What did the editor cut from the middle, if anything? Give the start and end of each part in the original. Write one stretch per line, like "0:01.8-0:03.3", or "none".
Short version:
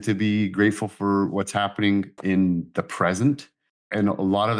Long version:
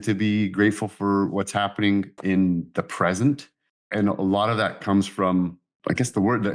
none